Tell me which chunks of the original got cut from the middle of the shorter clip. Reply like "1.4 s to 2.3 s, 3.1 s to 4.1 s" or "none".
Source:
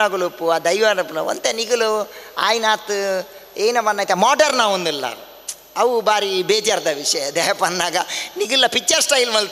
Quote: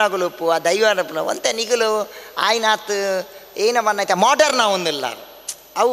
none